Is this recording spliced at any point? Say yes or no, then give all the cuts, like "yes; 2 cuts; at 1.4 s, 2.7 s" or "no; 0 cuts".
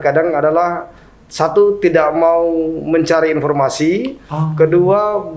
no; 0 cuts